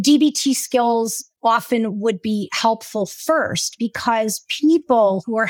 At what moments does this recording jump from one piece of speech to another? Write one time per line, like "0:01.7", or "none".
0:01.2

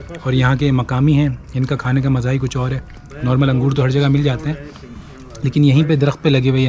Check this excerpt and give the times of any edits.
none

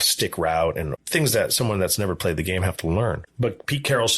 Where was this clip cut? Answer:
0:01.0
0:03.2

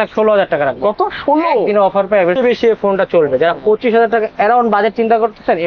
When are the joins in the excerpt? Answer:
0:02.4

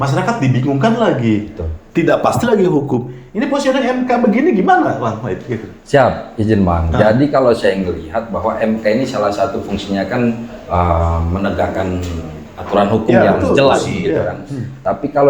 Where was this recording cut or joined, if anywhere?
none

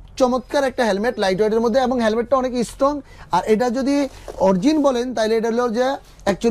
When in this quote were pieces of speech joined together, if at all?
none

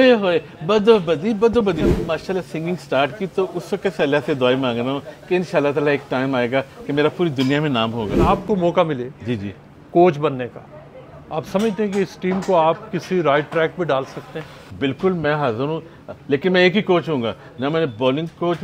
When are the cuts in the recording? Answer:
0:01.9
0:08.2
0:14.6

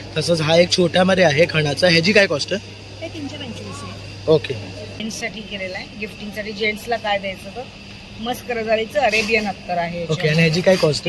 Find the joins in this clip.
0:05.0

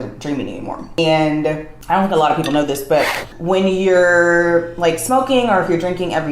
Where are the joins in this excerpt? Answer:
0:00.9
0:01.7
0:03.3

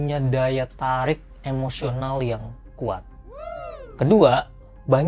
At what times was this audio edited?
none

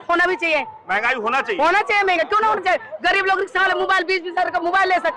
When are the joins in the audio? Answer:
none

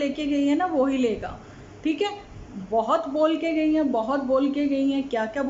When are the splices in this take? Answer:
none

